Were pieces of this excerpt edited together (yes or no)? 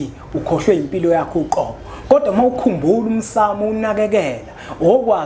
no